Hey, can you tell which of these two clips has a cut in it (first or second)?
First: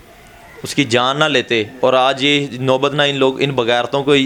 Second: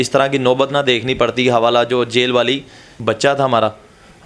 second